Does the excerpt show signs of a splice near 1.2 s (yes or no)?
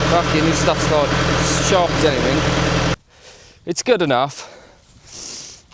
no